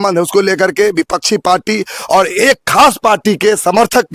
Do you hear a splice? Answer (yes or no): no